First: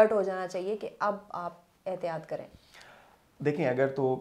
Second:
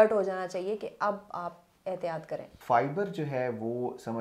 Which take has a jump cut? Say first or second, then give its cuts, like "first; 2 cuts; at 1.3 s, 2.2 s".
second; 1 cut; at 2.5 s